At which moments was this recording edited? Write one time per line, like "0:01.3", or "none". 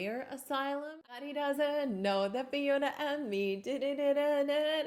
0:01.2